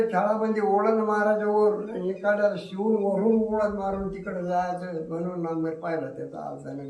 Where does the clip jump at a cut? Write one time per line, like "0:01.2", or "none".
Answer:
none